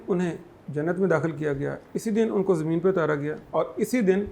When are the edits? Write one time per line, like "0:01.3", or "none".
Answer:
0:03.4